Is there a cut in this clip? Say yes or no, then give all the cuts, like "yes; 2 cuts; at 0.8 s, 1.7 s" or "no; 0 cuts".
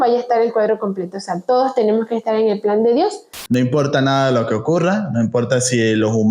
yes; 1 cut; at 3.3 s